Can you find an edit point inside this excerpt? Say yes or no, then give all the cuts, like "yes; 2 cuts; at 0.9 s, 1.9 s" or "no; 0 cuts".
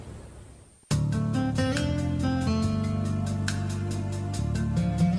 no; 0 cuts